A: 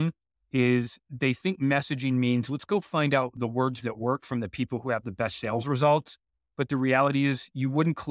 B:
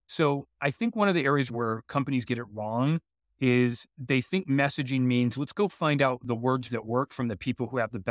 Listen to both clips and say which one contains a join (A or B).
B